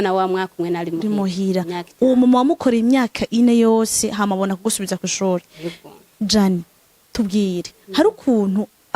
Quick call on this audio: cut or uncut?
uncut